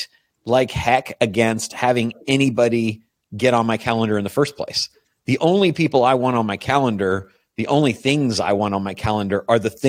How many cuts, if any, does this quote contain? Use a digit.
0